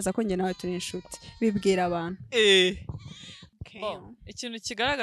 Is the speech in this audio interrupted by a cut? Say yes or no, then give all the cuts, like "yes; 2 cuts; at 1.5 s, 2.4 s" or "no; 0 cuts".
no; 0 cuts